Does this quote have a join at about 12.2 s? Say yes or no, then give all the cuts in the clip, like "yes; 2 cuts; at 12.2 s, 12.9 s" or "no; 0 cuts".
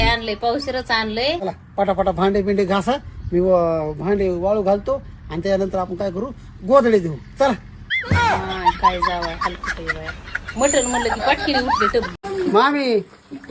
yes; 1 cut; at 12.2 s